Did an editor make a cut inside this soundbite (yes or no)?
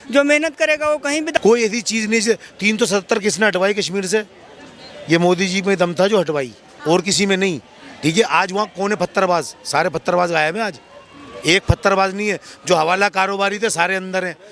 yes